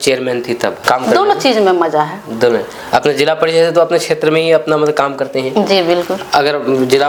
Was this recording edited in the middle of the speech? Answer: no; 0 cuts

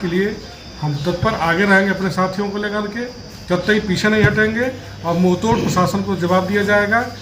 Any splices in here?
no; 0 cuts

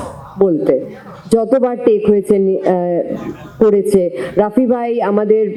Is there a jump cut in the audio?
no; 0 cuts

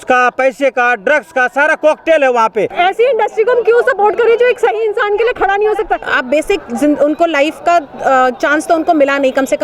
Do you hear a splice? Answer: yes; 2 cuts; at 2.7 s, 6.1 s

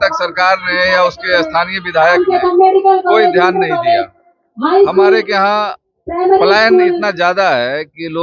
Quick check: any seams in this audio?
no; 0 cuts

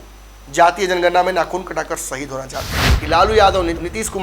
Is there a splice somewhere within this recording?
yes; 1 cut; at 2.9 s

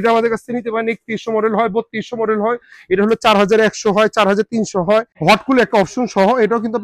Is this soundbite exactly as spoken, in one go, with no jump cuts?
no; 1 cut; at 5.1 s

